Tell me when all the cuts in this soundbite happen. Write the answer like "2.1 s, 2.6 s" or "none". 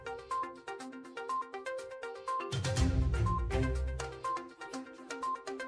1.6 s